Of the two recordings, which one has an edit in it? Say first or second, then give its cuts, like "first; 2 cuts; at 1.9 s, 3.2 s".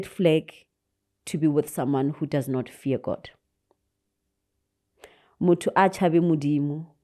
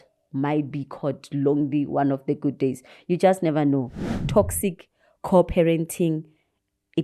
second; 1 cut; at 4.1 s